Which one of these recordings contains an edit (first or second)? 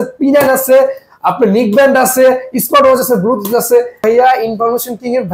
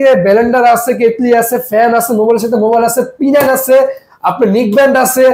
first